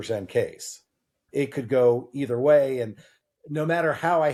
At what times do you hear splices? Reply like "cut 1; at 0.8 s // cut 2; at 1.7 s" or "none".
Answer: none